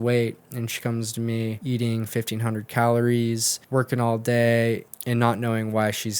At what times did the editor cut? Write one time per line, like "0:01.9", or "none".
0:01.6
0:03.5
0:04.9